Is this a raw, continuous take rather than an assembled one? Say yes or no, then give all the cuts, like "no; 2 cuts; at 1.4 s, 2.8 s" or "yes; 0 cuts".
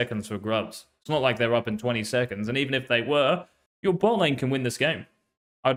yes; 0 cuts